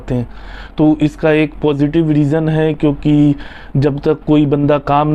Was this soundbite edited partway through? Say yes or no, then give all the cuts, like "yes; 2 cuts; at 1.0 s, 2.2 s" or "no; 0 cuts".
no; 0 cuts